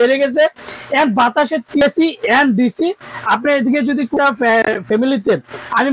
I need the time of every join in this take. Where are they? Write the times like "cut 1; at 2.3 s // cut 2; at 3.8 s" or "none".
cut 1; at 1.8 s // cut 2; at 4.1 s

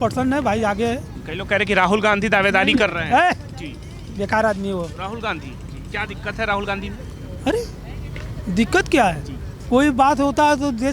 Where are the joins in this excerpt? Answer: none

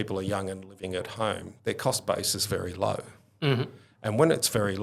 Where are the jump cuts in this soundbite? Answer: none

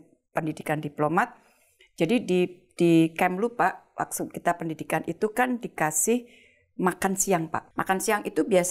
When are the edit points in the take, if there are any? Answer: cut 1; at 7.6 s

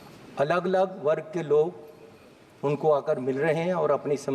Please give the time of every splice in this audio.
none

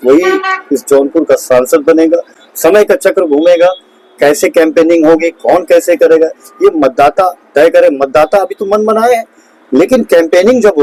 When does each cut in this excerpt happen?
none

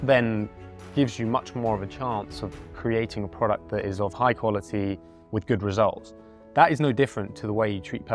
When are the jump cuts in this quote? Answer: none

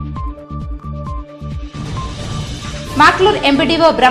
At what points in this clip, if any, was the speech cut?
cut 1; at 1.7 s

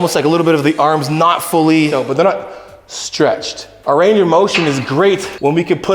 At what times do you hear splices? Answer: cut 1; at 2.0 s // cut 2; at 3.7 s

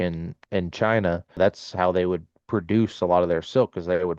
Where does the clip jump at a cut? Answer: cut 1; at 1.4 s

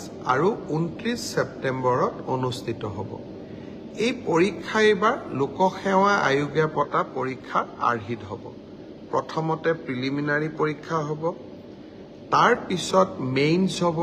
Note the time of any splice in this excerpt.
none

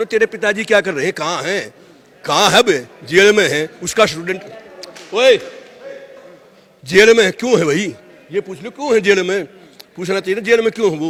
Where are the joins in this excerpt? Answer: none

